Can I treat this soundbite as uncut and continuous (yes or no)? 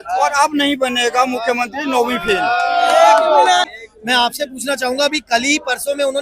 no